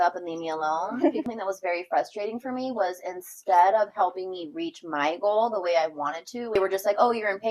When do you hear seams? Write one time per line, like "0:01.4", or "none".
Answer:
0:01.2
0:06.5